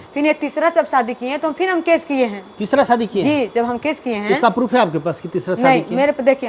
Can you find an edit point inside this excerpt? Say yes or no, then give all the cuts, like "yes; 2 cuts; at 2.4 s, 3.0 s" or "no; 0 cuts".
no; 0 cuts